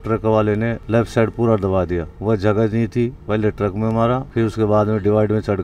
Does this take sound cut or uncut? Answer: uncut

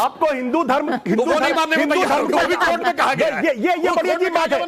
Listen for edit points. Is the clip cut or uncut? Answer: uncut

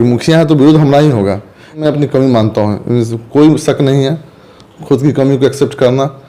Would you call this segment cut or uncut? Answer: cut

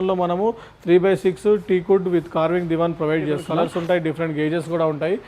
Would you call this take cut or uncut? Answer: cut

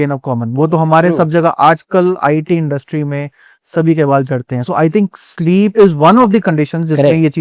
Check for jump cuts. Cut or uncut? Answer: uncut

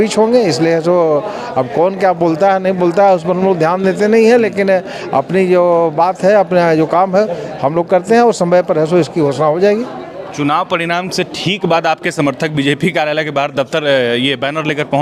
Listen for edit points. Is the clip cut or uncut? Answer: uncut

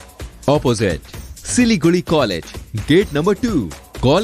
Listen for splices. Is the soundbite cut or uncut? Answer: uncut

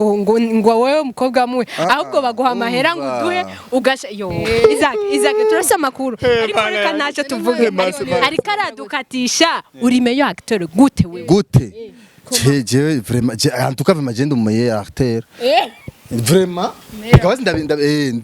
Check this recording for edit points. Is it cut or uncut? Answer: uncut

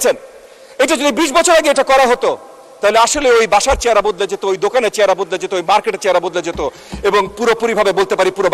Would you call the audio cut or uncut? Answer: uncut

